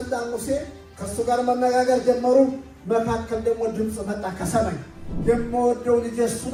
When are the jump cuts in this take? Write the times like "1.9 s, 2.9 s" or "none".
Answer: none